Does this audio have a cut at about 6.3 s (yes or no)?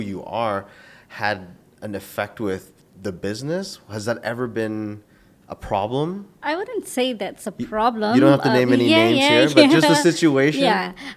yes